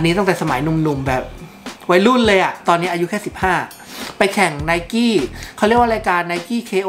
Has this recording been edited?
yes; 1 cut; at 2.6 s

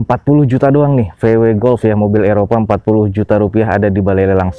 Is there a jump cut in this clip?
no; 0 cuts

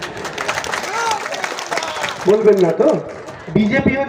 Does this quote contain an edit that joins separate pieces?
no; 0 cuts

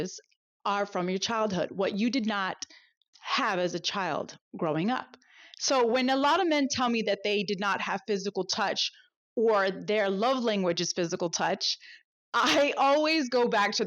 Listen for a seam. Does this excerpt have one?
yes; 1 cut; at 3.0 s

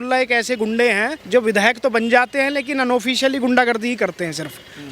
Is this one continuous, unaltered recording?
no; 1 cut; at 1.2 s

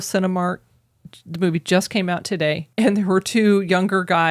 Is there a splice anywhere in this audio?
yes; 1 cut; at 2.6 s

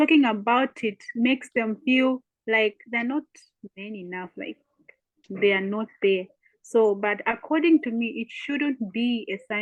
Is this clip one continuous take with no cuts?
yes; 0 cuts

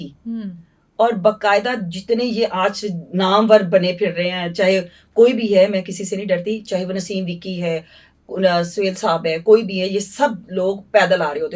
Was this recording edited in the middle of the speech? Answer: no; 0 cuts

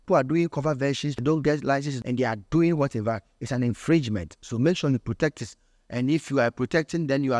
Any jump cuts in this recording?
yes; 2 cuts; at 1.1 s, 1.9 s

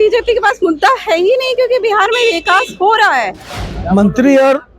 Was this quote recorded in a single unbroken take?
no; 1 cut; at 3.4 s

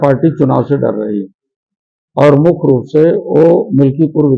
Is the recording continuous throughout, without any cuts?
yes; 0 cuts

